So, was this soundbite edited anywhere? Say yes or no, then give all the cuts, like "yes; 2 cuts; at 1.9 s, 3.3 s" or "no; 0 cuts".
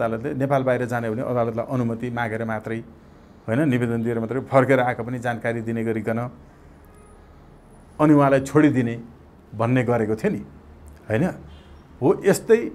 no; 0 cuts